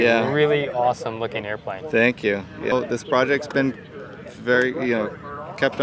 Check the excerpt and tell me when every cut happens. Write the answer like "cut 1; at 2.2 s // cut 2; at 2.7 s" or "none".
cut 1; at 2.7 s